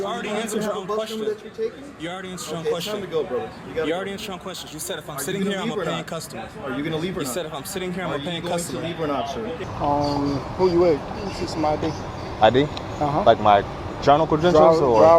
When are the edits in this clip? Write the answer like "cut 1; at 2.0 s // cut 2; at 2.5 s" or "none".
cut 1; at 9.6 s